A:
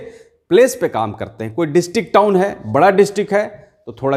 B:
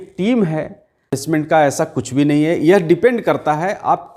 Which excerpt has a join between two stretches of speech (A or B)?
B